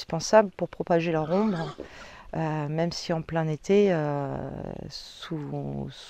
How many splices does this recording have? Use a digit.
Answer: 0